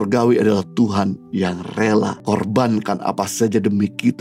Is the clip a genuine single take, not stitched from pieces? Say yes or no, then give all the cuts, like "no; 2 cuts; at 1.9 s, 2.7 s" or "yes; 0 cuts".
no; 1 cut; at 2.2 s